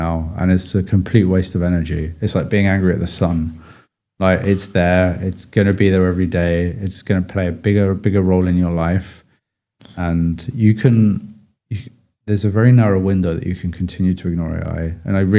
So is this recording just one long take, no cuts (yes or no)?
yes